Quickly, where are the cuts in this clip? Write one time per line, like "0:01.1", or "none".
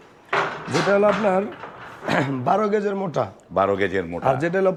none